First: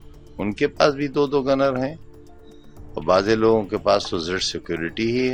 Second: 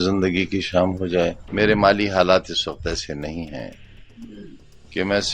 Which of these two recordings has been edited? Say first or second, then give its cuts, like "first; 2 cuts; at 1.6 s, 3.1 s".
second; 1 cut; at 1.4 s